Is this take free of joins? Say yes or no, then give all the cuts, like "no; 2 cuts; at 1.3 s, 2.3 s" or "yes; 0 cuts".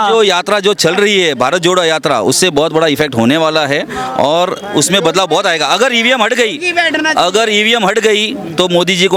yes; 0 cuts